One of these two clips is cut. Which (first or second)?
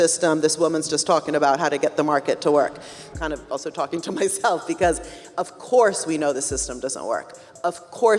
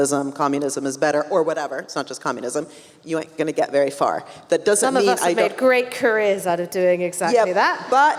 first